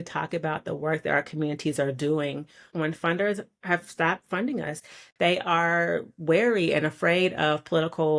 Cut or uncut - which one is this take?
cut